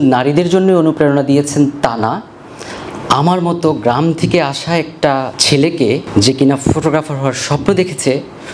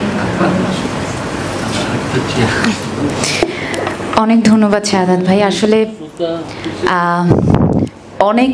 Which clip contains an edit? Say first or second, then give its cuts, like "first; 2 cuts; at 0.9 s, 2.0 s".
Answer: first; 2 cuts; at 5.4 s, 6.0 s